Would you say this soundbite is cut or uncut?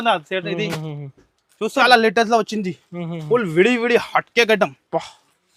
cut